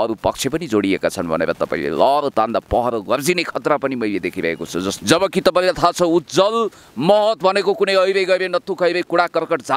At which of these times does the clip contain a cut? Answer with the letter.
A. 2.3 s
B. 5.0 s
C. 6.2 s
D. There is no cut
B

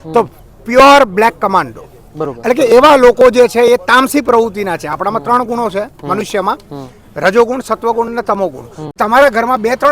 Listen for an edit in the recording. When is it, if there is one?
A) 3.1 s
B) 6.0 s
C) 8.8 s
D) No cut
C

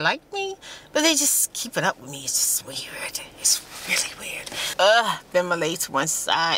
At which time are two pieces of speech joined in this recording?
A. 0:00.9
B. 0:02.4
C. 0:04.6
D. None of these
C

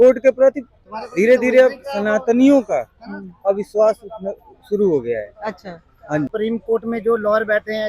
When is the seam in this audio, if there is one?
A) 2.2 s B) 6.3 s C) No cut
B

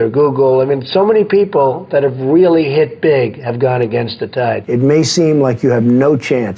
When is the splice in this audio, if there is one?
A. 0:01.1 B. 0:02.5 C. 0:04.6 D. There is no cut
C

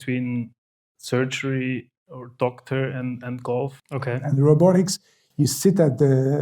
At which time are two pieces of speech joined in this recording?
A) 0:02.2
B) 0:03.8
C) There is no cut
B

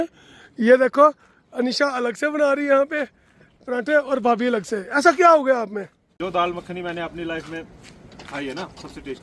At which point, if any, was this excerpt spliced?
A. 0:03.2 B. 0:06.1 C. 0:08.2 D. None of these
B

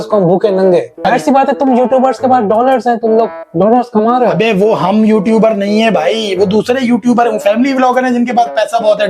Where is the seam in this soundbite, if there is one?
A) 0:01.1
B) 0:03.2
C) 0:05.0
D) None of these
A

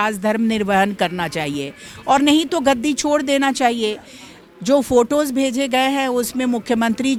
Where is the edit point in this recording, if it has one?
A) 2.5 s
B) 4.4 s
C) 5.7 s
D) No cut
D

